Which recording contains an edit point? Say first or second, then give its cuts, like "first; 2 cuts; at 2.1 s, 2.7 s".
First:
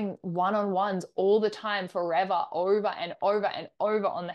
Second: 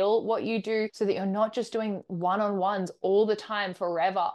second; 1 cut; at 0.9 s